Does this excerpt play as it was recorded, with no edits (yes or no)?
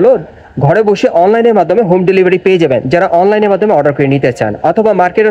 yes